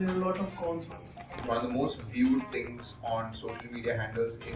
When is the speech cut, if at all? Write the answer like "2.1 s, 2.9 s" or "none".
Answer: 1.5 s